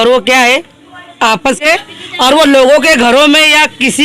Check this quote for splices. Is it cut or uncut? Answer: cut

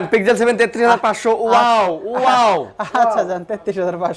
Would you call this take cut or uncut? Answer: uncut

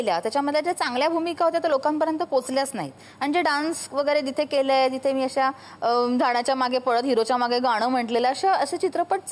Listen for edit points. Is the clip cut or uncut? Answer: uncut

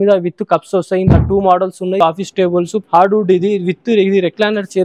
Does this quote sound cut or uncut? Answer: cut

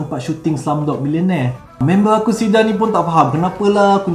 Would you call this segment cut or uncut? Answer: cut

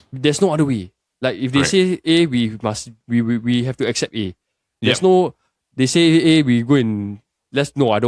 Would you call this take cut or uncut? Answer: uncut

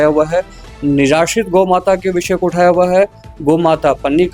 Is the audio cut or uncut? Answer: uncut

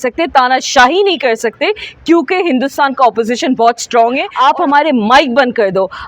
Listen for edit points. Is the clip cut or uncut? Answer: cut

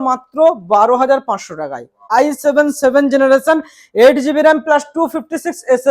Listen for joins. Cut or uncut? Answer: cut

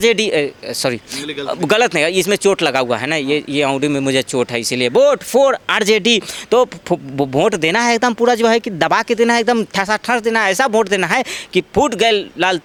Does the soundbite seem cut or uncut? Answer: uncut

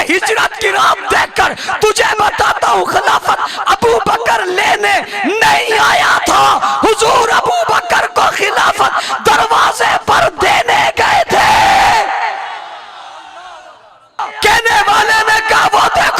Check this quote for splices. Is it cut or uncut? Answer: cut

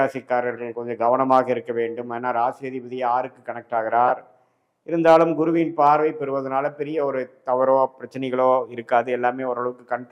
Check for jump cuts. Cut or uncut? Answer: uncut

